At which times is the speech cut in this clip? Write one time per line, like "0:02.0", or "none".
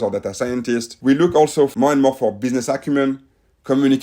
0:00.9
0:01.7